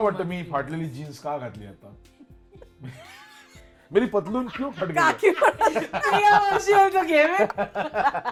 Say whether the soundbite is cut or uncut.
uncut